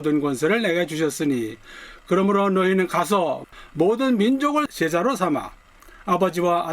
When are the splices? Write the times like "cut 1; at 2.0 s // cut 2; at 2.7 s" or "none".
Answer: cut 1; at 3.4 s // cut 2; at 4.7 s